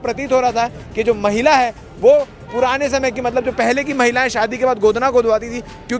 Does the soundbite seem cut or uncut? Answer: uncut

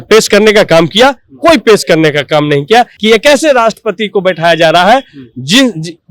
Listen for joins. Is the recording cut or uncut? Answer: cut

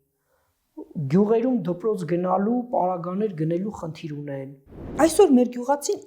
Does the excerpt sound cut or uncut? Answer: cut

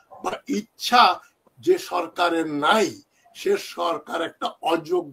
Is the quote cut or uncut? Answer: uncut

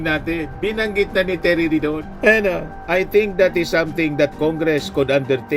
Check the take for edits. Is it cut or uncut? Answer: uncut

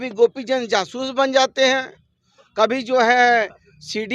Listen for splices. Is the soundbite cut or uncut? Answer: uncut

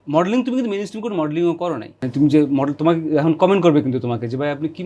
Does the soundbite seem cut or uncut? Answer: cut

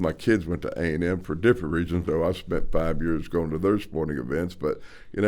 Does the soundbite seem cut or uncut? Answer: cut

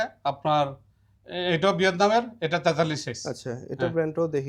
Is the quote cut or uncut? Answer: uncut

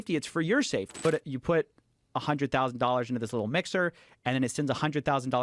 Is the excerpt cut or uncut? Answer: cut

